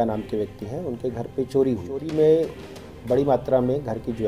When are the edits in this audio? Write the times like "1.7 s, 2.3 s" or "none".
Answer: 2.1 s